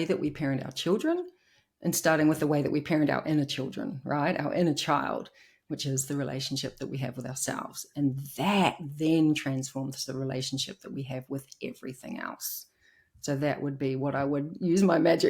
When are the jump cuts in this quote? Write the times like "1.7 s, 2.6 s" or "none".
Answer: none